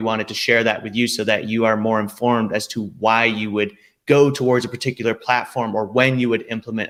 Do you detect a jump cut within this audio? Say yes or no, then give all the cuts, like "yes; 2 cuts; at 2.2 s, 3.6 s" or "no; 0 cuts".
no; 0 cuts